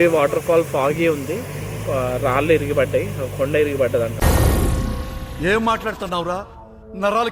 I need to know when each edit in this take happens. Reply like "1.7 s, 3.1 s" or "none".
4.1 s